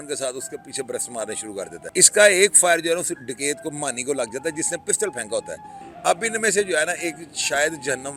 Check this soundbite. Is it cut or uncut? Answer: cut